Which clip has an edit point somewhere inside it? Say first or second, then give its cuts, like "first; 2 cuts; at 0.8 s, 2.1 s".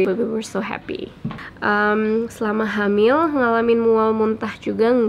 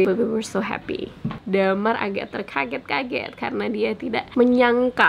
second; 2 cuts; at 1.3 s, 4.3 s